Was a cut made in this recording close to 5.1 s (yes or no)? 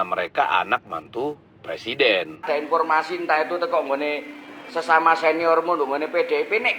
no